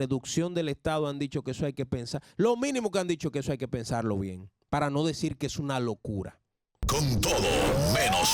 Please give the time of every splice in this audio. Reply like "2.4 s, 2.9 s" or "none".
6.8 s